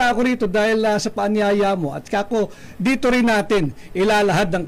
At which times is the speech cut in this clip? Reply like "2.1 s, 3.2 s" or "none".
none